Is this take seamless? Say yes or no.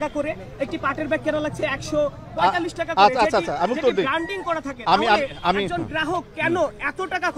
yes